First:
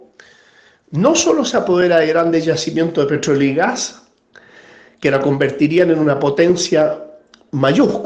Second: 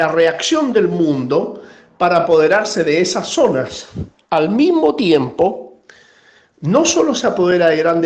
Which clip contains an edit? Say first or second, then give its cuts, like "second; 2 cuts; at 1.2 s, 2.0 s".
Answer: second; 1 cut; at 4.5 s